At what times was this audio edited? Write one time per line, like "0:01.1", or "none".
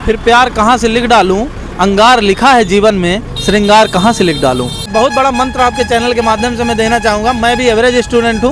0:04.9